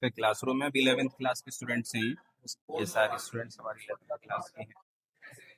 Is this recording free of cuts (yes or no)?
yes